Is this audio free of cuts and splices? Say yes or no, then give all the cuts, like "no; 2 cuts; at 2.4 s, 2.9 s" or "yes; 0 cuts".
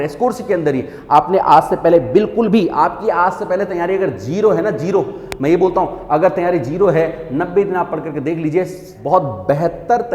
no; 1 cut; at 8.9 s